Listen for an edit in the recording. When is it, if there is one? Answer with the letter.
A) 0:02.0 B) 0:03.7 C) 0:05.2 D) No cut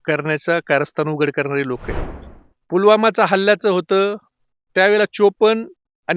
A